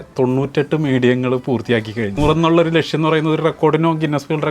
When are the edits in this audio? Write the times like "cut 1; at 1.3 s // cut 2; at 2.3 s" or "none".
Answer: cut 1; at 2.1 s